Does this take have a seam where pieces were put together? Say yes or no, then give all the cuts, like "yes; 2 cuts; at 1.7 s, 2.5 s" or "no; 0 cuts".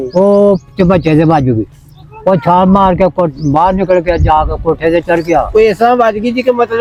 no; 0 cuts